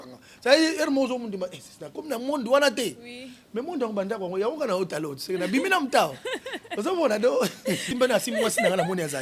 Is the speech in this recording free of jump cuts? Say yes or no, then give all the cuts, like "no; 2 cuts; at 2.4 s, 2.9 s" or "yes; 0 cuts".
no; 1 cut; at 7.9 s